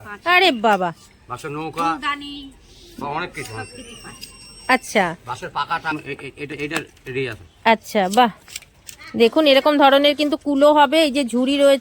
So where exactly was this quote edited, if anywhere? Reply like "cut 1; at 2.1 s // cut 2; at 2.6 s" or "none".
cut 1; at 5.9 s